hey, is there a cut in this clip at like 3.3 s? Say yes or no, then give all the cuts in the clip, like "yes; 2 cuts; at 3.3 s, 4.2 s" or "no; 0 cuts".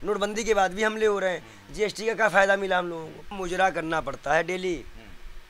yes; 1 cut; at 3.3 s